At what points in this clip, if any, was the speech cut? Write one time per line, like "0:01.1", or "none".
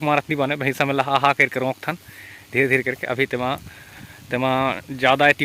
none